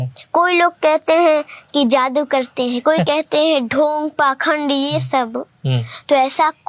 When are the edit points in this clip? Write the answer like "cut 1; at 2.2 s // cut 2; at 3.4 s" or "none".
none